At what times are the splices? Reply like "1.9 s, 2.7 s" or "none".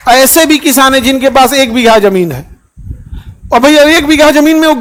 none